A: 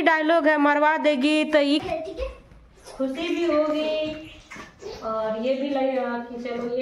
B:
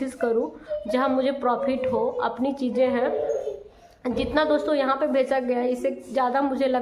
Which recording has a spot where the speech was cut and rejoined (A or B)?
A